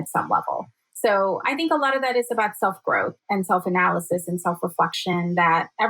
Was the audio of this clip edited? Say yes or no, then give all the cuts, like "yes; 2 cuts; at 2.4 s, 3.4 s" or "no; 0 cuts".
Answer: yes; 2 cuts; at 1.4 s, 3.2 s